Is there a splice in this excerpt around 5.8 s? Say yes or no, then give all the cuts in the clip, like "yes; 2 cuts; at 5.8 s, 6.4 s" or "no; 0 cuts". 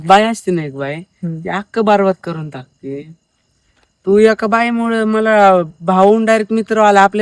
no; 0 cuts